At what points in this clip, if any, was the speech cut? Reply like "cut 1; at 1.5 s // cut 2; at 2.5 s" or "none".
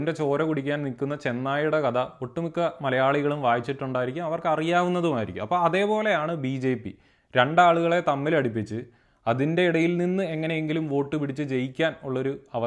none